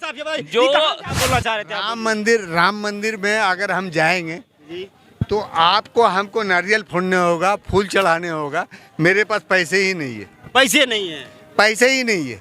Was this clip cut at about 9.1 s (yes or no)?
no